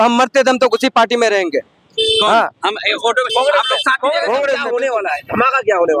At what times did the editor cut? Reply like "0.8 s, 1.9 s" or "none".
4.6 s